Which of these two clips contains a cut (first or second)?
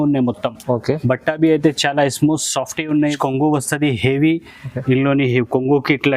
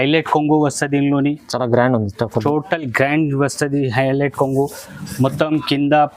first